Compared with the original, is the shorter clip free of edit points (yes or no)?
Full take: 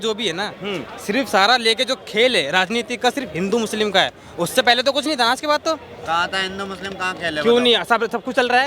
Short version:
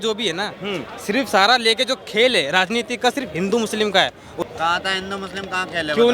no